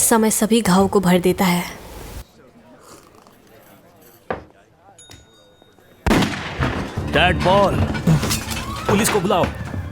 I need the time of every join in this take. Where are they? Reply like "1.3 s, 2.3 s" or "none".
5.9 s, 7.0 s